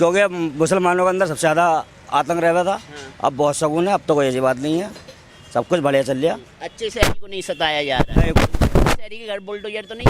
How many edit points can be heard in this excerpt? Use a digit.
0